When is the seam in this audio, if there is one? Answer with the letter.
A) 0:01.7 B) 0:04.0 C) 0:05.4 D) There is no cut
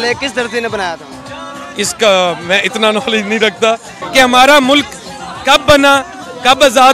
B